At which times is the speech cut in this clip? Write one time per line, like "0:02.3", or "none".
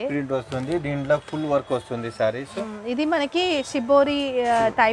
none